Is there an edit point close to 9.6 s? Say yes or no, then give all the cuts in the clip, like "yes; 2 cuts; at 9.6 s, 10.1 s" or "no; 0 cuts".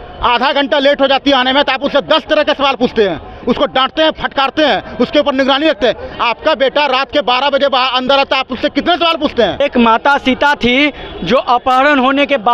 yes; 1 cut; at 9.6 s